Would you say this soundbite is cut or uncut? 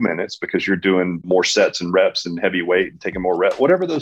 cut